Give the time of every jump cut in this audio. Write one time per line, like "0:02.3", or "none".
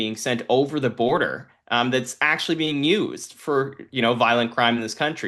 none

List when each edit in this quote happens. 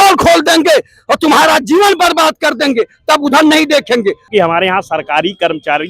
0:04.3

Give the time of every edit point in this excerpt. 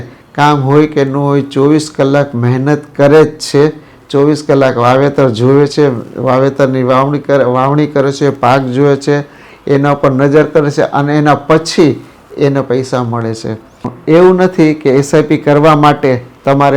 0:13.9

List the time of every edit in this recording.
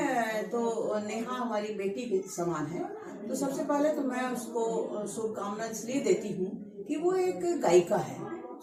none

